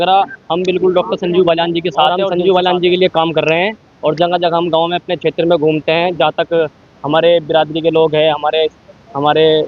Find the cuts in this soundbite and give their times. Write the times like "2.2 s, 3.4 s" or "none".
2.2 s